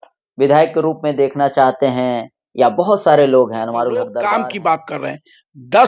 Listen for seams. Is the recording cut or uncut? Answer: cut